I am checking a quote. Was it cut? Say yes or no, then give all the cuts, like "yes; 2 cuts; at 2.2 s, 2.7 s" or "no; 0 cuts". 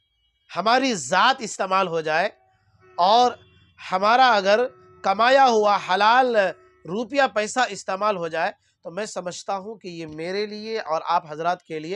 no; 0 cuts